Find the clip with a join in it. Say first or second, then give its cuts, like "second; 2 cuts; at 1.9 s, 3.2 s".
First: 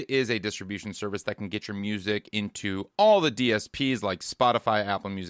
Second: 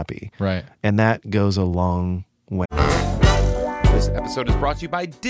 second; 1 cut; at 2.6 s